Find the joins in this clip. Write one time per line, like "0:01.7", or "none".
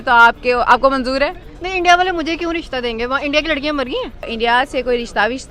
0:04.3